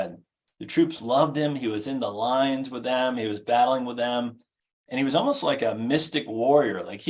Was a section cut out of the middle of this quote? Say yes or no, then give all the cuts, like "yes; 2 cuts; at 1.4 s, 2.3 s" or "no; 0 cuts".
no; 0 cuts